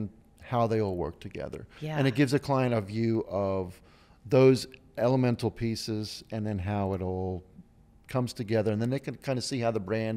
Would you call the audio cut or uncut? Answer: uncut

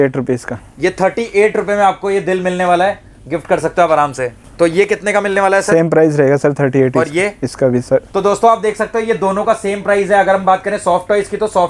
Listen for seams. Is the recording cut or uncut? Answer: uncut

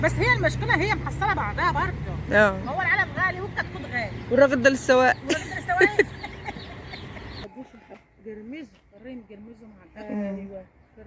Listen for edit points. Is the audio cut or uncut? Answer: uncut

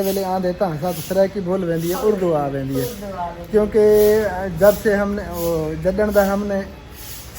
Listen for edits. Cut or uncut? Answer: uncut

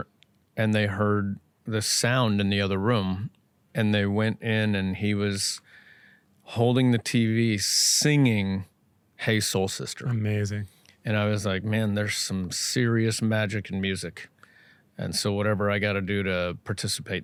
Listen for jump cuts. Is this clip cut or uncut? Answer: uncut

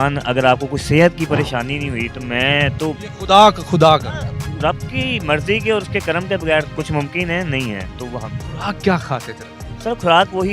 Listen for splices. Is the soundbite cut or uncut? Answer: uncut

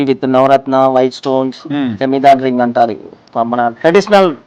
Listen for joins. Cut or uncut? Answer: uncut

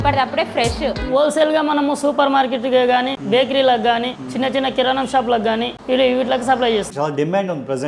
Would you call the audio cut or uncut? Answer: cut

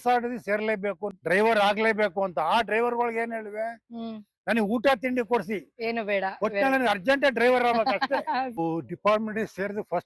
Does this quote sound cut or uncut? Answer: cut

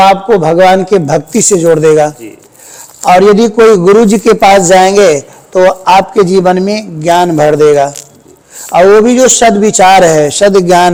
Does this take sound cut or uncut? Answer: uncut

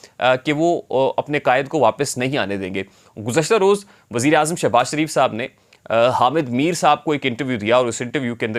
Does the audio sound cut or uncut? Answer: uncut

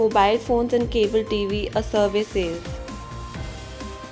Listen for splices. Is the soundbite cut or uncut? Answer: cut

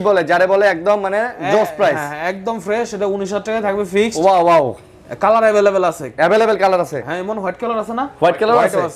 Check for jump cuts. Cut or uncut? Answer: uncut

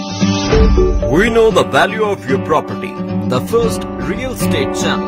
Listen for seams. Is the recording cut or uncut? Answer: uncut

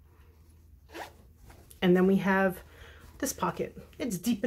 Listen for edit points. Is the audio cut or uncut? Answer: uncut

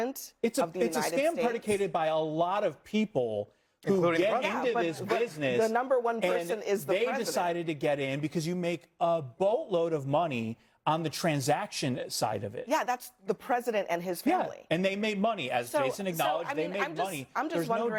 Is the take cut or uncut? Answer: uncut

